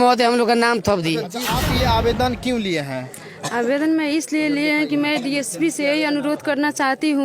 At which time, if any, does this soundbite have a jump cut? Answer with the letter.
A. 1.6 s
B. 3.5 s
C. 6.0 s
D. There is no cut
A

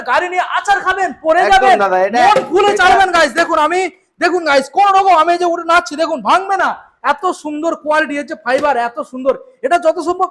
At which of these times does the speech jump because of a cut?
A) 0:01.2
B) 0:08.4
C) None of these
C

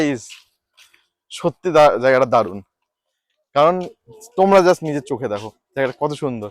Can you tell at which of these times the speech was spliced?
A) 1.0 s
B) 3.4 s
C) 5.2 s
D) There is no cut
D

